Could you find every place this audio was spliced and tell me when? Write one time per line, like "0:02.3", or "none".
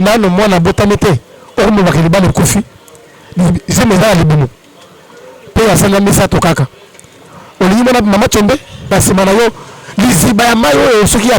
0:08.9